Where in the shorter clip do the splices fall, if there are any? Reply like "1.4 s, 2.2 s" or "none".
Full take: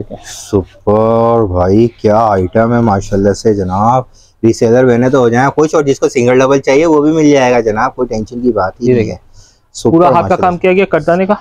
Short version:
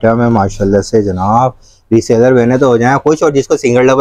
none